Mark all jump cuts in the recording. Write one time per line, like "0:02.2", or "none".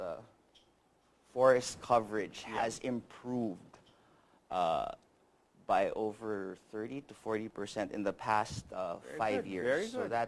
0:05.9